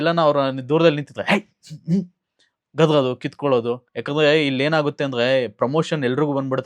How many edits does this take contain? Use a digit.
1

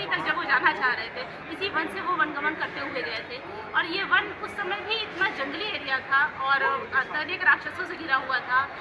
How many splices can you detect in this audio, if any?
0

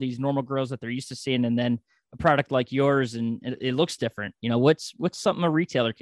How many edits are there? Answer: 0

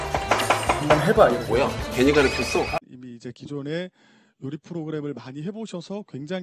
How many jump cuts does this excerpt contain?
0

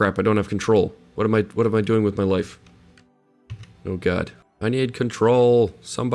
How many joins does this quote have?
0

